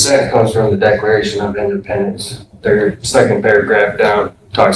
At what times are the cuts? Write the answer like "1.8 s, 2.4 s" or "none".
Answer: none